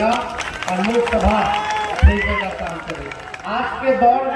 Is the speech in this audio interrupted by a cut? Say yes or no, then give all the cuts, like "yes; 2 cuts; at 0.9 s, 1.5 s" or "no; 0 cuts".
yes; 1 cut; at 3.3 s